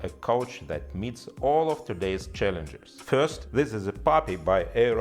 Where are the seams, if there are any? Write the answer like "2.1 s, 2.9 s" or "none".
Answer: 3.4 s